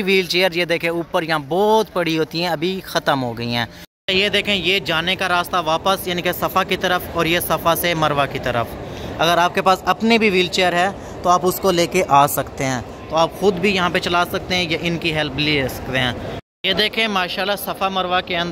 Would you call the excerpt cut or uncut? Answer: cut